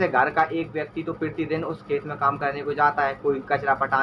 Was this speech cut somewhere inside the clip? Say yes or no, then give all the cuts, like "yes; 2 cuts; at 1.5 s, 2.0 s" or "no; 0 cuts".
no; 0 cuts